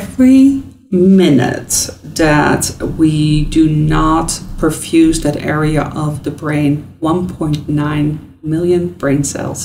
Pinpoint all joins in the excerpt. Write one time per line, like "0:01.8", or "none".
none